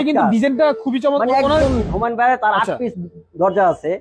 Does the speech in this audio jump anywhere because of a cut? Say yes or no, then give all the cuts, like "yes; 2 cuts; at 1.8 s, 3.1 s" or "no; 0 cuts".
yes; 1 cut; at 1.5 s